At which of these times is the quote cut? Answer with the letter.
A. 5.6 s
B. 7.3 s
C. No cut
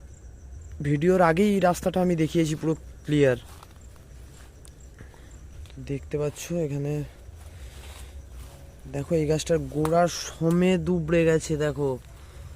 A